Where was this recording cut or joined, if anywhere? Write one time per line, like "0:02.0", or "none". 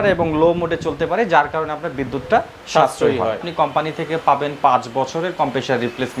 0:03.5